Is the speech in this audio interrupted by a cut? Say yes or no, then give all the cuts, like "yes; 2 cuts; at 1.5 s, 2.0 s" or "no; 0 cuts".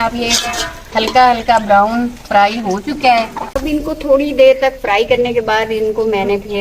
yes; 1 cut; at 3.4 s